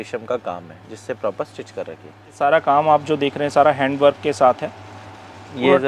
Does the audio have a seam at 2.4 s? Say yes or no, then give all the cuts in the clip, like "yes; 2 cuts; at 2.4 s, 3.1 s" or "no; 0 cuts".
yes; 1 cut; at 2.4 s